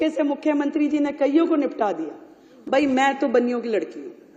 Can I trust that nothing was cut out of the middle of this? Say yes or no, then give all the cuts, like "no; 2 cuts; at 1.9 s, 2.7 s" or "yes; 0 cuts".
yes; 0 cuts